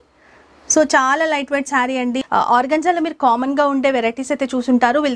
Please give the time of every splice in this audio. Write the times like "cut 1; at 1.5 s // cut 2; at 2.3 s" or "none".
cut 1; at 2.2 s